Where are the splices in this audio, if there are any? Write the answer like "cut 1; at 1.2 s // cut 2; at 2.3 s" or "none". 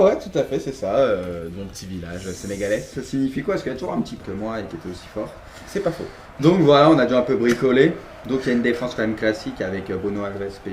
none